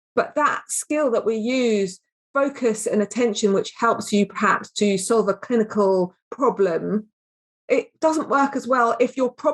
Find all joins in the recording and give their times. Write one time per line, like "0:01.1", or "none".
0:07.6